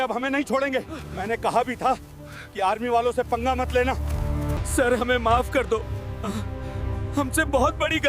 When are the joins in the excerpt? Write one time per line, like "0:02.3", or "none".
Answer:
0:04.6